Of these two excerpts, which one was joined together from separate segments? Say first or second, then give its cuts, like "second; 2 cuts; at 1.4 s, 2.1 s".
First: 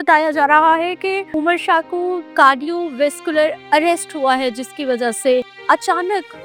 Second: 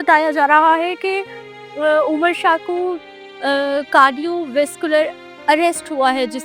first; 4 cuts; at 1.3 s, 2.3 s, 3.6 s, 5.5 s